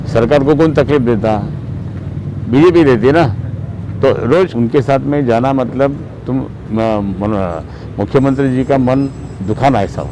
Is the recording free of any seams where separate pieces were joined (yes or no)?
no